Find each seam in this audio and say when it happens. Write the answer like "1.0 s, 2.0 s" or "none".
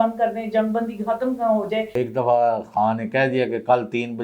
2.0 s